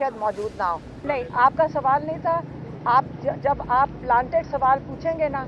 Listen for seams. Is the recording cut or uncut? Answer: cut